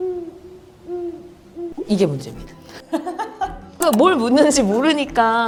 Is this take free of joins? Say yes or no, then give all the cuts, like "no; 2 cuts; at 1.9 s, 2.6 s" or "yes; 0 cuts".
yes; 0 cuts